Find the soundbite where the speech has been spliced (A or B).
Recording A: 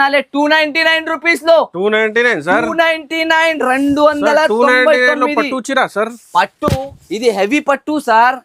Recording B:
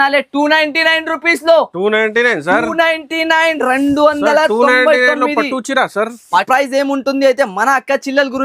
B